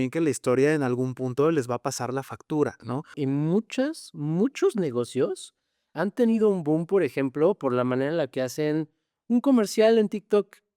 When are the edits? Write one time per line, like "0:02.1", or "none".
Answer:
0:03.2

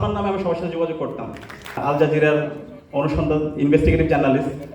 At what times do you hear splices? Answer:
0:01.8

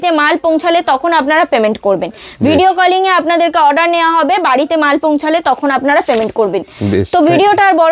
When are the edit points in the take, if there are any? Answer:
none

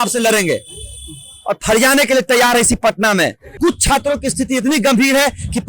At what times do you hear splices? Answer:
0:03.4

